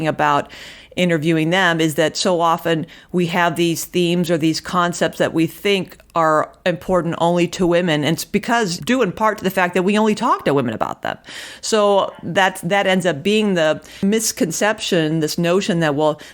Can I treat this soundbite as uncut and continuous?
no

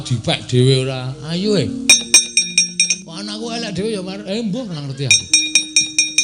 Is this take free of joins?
no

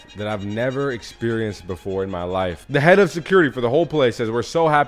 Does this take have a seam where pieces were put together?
yes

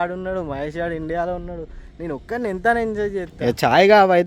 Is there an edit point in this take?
yes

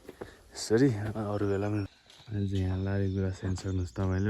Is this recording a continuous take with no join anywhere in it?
no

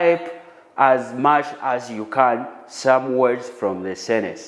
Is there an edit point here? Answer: no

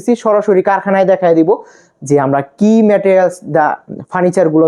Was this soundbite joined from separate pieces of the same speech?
no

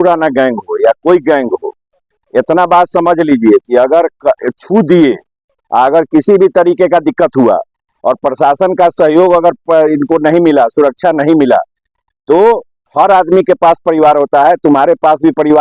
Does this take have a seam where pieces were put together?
no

